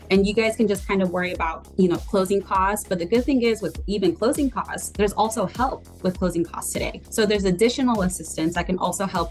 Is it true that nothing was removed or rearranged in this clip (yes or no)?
yes